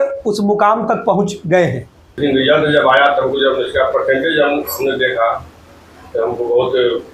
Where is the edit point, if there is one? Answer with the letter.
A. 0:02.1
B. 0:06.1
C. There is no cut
A